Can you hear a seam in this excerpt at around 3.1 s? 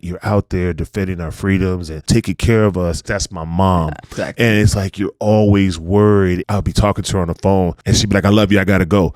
yes; 4 cuts; at 2.0 s, 3.1 s, 6.4 s, 7.8 s

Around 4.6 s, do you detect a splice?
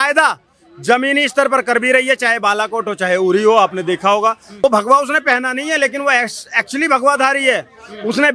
yes; 1 cut; at 4.6 s

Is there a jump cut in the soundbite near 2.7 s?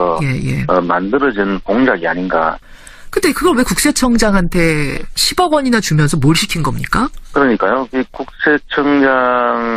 no; 0 cuts

